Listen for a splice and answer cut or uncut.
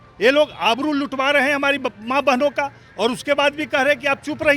uncut